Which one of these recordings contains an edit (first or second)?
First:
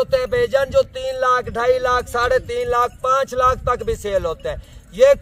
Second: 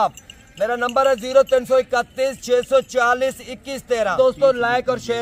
second